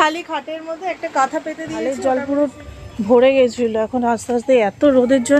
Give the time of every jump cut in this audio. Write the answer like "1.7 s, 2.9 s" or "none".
1.8 s